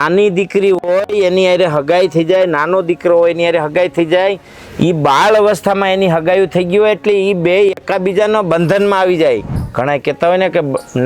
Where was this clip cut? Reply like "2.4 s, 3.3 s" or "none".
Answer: 9.6 s